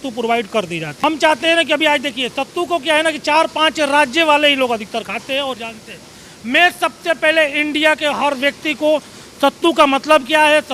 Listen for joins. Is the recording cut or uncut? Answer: uncut